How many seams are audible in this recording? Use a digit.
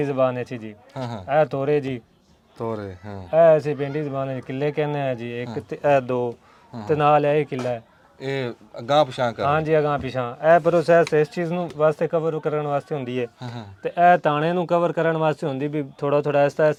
0